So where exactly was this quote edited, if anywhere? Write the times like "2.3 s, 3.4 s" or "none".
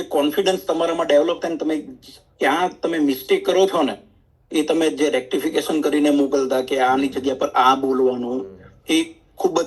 none